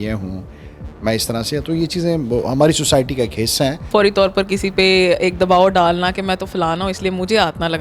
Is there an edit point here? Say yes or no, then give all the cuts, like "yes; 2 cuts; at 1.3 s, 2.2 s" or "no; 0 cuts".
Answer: yes; 1 cut; at 3.8 s